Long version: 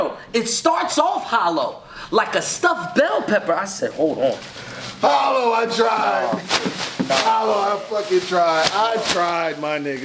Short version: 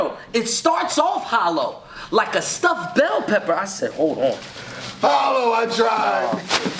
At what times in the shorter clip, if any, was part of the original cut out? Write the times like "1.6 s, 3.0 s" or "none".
none